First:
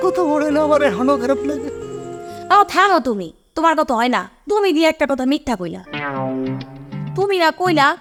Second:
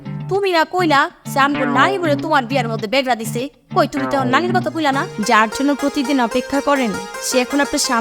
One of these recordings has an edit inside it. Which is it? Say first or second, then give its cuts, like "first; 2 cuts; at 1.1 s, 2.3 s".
second; 1 cut; at 5.1 s